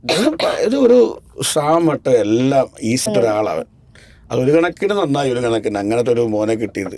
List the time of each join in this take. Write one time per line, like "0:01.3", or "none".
0:03.1